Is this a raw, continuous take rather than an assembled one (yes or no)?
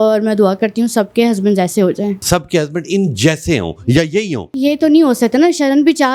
no